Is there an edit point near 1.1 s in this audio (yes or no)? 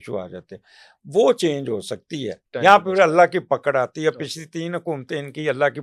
no